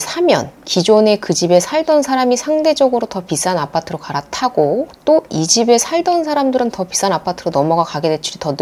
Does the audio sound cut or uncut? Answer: uncut